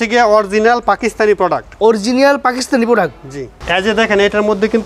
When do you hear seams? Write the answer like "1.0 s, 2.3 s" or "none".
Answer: 1.6 s, 3.6 s